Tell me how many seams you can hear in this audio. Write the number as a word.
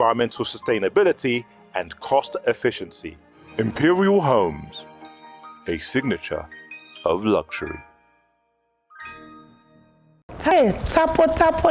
one